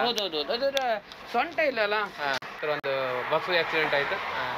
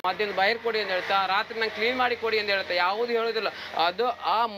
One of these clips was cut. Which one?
first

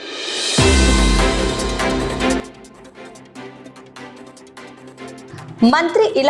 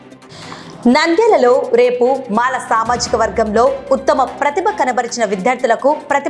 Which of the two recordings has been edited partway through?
first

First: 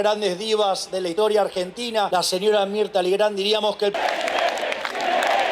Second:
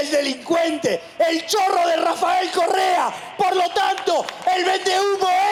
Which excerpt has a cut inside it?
first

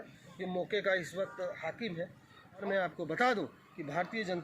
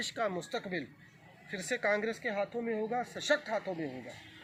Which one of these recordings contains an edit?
first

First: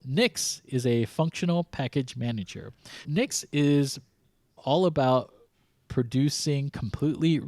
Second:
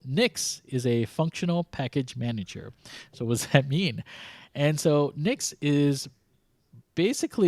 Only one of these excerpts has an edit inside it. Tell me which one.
first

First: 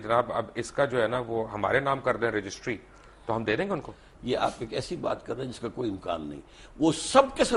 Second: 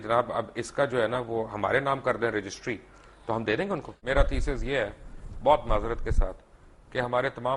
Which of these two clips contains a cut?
second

